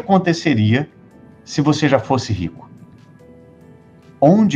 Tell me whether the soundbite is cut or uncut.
uncut